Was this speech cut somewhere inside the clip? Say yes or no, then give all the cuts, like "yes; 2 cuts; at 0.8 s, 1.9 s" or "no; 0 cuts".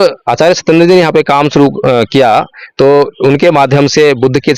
no; 0 cuts